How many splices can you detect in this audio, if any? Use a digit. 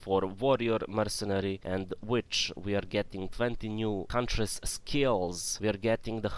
3